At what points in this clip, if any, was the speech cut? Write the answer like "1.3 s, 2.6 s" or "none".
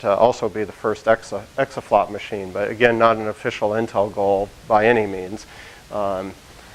4.4 s